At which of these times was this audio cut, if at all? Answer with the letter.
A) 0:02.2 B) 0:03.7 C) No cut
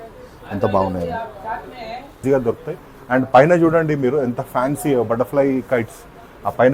A